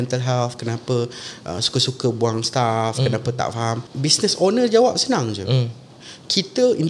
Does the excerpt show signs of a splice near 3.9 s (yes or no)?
yes